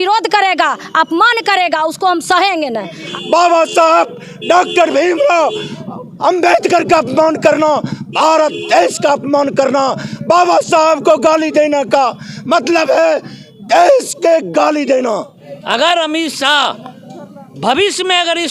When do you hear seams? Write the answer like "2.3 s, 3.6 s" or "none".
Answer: 3.0 s, 15.4 s